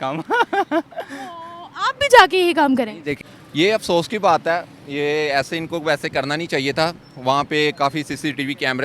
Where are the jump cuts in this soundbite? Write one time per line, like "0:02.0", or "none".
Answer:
0:03.2